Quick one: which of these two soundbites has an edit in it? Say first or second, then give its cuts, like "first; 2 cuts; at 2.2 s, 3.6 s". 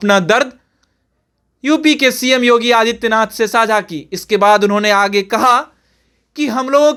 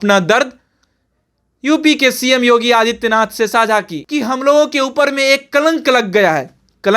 second; 1 cut; at 4.0 s